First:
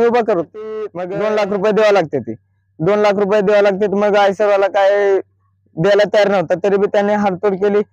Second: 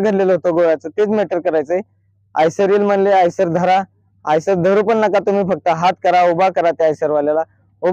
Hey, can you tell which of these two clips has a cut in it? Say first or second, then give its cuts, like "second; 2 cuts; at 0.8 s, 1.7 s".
first; 1 cut; at 1.0 s